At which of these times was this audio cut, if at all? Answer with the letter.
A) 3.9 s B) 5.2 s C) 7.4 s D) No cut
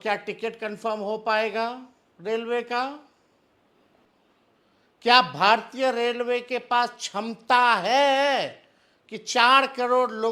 A